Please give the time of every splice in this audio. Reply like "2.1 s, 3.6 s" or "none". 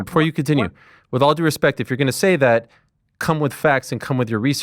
none

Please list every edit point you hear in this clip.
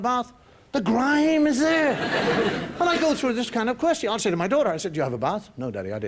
5.1 s

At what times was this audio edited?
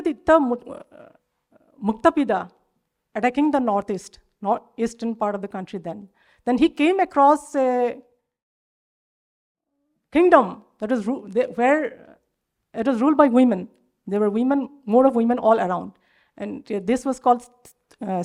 none

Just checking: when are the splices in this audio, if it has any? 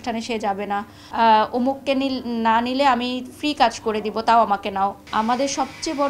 1.0 s, 5.0 s

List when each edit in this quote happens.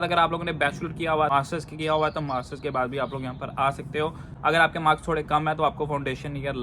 1.3 s, 4.3 s

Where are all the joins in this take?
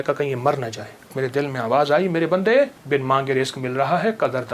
1.1 s, 2.8 s

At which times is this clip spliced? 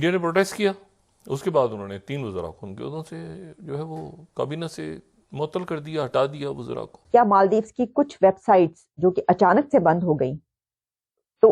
7.0 s

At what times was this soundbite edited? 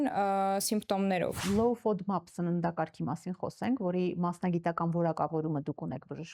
1.4 s

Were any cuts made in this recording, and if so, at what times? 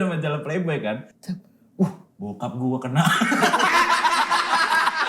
1.1 s

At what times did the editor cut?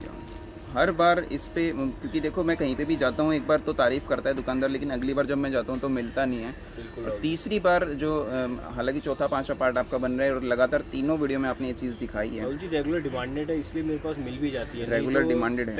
none

